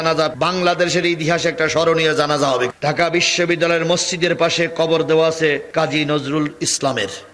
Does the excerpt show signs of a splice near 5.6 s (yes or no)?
yes